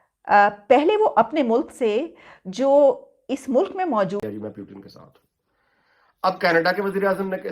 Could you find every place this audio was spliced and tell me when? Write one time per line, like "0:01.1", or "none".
0:04.2